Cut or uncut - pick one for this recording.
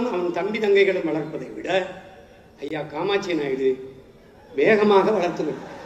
uncut